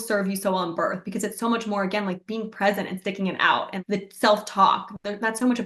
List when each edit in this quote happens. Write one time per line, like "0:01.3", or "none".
0:03.8